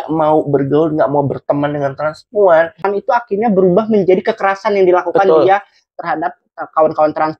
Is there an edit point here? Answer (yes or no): yes